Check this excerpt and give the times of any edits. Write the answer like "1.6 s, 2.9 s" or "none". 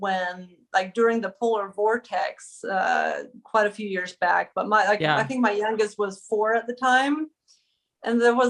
none